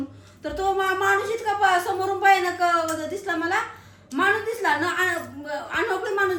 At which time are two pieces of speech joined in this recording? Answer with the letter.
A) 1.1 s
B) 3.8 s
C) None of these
C